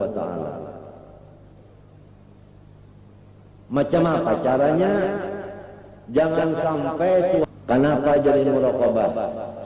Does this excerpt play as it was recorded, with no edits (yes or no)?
no